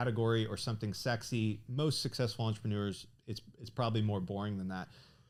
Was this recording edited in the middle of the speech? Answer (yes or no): no